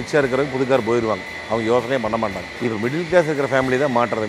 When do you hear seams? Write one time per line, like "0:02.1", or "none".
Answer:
0:02.5